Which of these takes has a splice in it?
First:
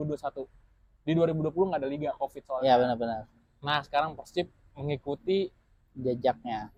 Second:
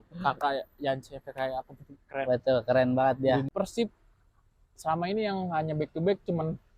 second; 1 cut; at 3.5 s

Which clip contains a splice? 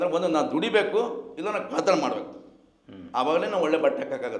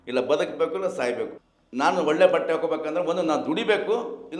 second; 1 cut; at 1.4 s

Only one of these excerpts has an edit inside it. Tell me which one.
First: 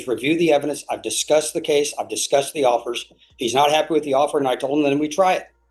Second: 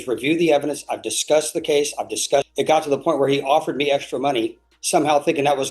second; 1 cut; at 2.5 s

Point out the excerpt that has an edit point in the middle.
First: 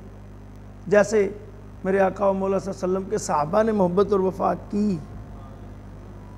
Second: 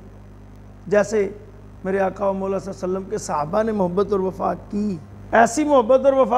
second; 1 cut; at 5.1 s

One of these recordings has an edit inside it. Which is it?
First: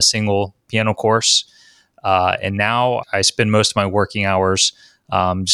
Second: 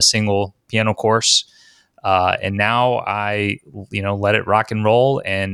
first; 1 cut; at 3.0 s

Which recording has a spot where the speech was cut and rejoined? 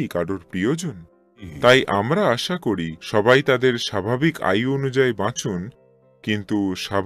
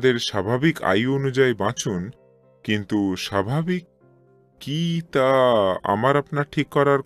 first; 1 cut; at 1.5 s

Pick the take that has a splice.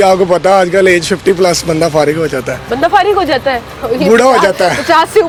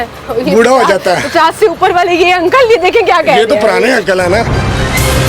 second; 1 cut; at 4.4 s

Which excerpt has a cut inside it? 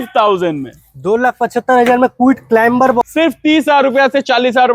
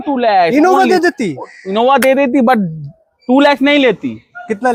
first; 1 cut; at 3.0 s

